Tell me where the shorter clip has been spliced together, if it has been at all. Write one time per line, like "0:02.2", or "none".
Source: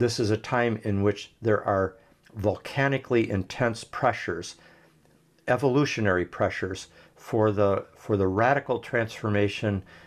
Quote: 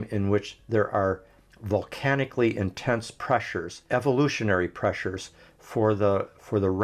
0:03.8